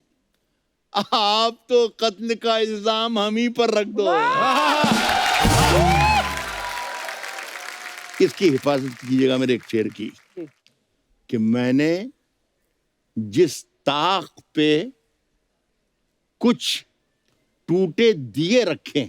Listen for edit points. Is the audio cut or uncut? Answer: uncut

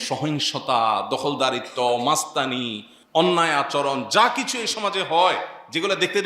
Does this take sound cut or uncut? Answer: uncut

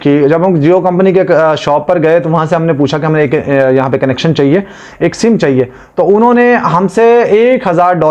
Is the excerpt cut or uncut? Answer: uncut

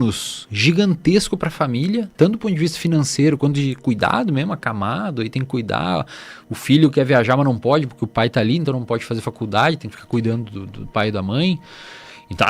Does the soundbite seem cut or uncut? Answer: uncut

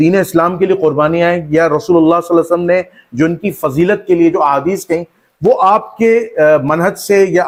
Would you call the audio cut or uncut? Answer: uncut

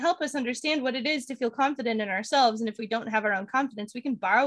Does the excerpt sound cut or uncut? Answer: uncut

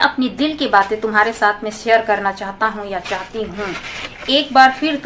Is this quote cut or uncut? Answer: uncut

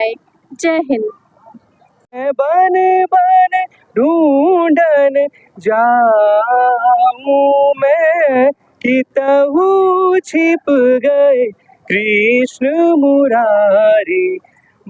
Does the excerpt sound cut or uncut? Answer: cut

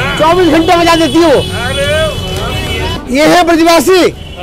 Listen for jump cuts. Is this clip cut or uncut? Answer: cut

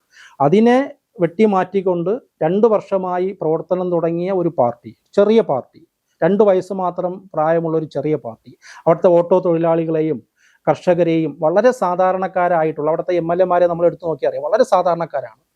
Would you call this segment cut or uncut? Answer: uncut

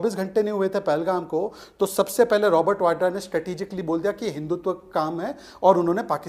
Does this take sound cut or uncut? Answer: uncut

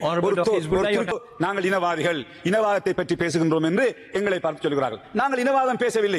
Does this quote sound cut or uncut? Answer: cut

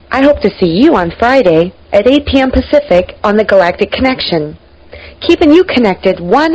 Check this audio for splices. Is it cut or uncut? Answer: uncut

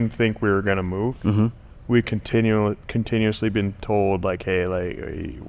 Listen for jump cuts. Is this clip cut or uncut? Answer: uncut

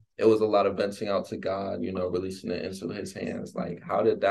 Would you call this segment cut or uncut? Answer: uncut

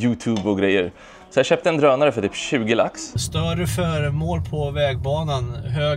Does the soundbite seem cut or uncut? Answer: cut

